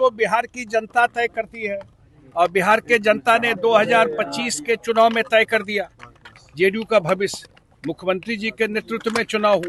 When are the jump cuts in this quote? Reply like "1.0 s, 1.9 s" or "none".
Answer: none

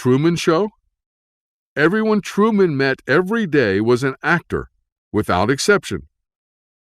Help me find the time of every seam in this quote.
1.7 s

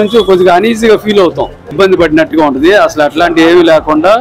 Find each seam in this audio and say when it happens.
1.7 s

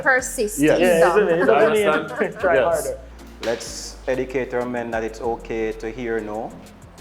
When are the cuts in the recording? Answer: 3.1 s

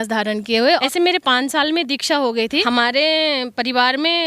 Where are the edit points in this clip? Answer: 0.8 s, 2.6 s

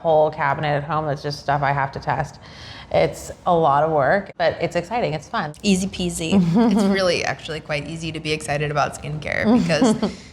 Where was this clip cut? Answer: 4.3 s, 5.5 s

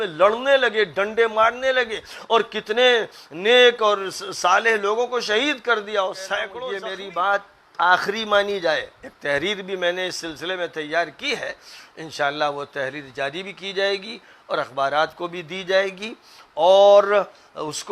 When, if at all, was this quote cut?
6.6 s

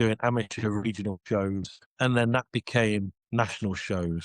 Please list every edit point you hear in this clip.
1.8 s, 3.2 s

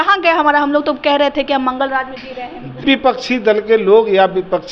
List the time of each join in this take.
2.8 s

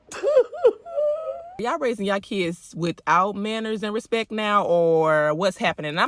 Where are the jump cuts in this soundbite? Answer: 1.6 s

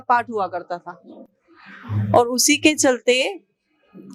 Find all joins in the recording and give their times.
none

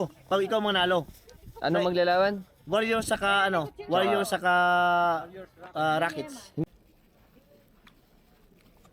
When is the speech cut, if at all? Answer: 6.6 s

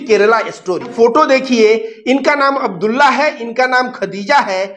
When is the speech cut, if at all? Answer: 0.9 s

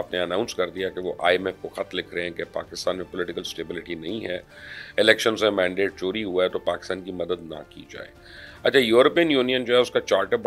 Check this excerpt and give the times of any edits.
none

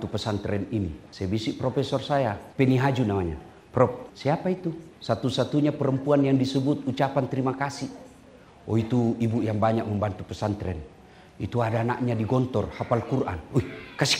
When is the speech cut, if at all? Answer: 1.0 s, 2.4 s, 4.5 s

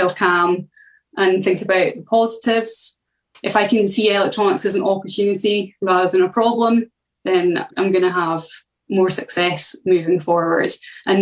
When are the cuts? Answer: 3.3 s

